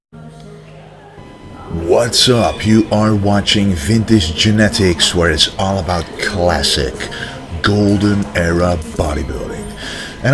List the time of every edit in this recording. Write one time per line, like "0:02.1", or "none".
0:08.5